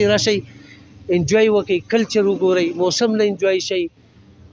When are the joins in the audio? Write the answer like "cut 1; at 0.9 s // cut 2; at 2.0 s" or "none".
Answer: none

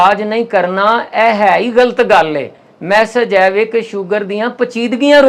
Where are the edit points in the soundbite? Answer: none

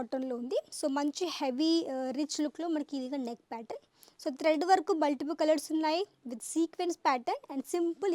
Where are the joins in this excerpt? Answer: none

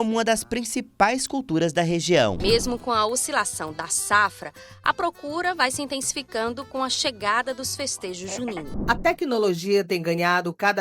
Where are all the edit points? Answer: cut 1; at 2.4 s // cut 2; at 8.6 s

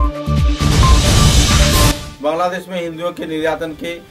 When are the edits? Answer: cut 1; at 1.9 s

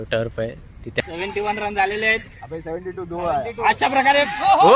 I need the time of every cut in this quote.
cut 1; at 1.0 s

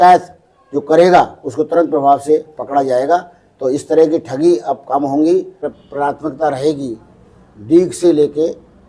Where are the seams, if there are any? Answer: cut 1; at 5.7 s

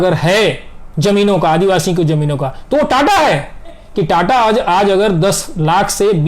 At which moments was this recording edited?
cut 1; at 3.8 s

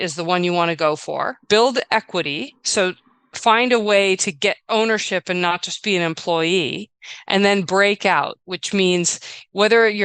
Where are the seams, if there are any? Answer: cut 1; at 1.3 s

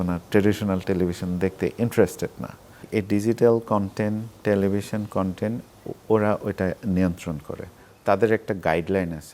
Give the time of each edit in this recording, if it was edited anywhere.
cut 1; at 2.9 s

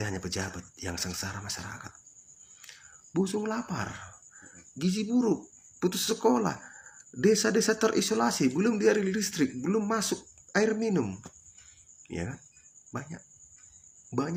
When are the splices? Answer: none

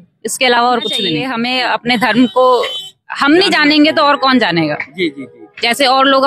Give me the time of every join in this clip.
cut 1; at 1.2 s

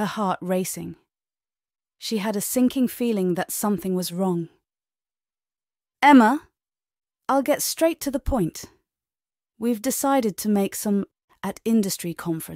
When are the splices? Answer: cut 1; at 11.2 s

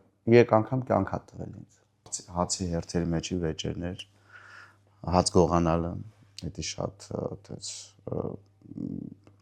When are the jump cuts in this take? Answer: cut 1; at 2.2 s

